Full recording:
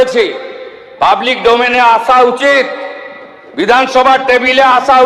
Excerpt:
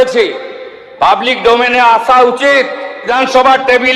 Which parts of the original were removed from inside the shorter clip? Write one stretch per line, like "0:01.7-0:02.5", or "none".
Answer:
0:03.0-0:03.6